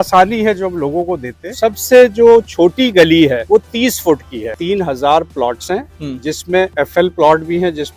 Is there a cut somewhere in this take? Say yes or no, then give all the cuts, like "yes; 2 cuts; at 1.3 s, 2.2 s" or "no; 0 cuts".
yes; 3 cuts; at 1.5 s, 3.4 s, 4.5 s